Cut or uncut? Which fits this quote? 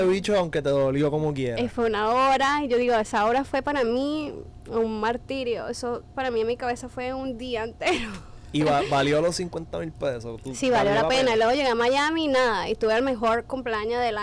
uncut